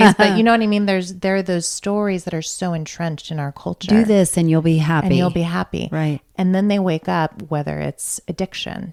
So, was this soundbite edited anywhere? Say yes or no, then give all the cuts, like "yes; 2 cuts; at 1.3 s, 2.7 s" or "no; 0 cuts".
no; 0 cuts